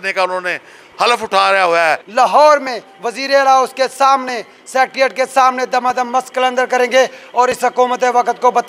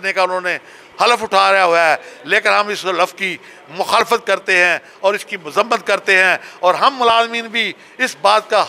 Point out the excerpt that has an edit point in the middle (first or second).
first